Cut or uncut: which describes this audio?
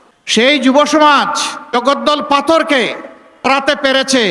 cut